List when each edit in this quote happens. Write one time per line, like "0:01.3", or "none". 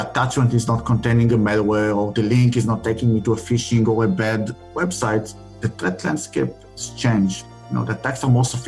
0:04.7
0:05.7
0:07.5